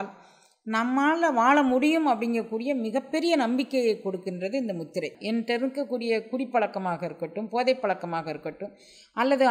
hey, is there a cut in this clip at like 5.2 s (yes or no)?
yes